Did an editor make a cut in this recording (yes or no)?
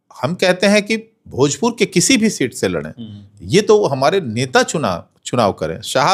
no